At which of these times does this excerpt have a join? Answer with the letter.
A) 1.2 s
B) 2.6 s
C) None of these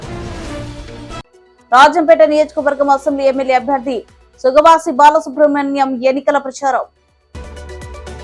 A